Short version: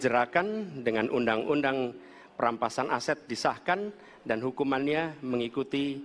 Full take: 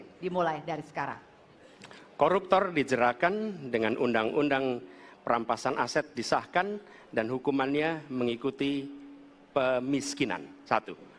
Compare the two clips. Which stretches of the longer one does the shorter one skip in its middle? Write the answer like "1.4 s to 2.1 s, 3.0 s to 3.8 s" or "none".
none